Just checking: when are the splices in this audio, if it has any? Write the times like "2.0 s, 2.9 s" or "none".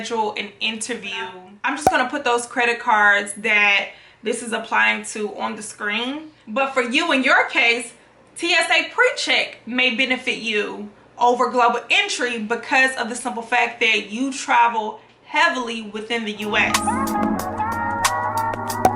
1.5 s, 6.4 s, 16.7 s